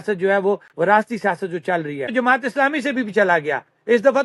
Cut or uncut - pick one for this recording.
cut